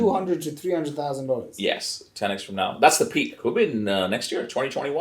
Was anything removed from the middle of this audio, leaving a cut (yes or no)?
yes